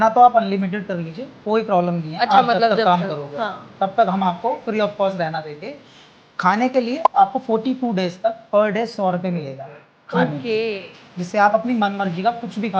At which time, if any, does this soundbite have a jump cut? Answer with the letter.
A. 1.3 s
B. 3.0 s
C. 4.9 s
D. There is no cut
D